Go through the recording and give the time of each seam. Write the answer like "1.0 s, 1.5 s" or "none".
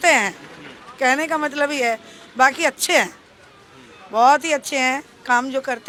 none